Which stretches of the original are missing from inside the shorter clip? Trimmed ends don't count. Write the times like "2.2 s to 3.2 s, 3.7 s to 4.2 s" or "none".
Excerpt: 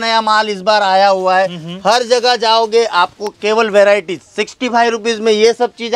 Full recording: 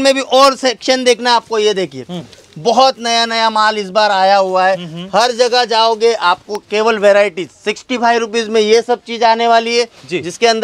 none